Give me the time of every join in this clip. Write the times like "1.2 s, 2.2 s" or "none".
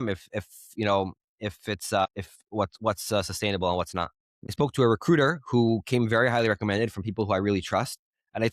4.5 s